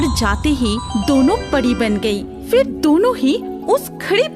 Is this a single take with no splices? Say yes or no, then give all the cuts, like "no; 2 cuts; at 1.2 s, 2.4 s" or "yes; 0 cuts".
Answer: yes; 0 cuts